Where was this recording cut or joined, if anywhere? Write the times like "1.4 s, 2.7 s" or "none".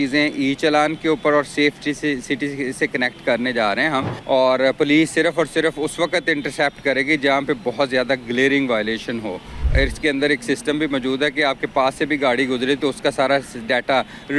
4.1 s, 9.7 s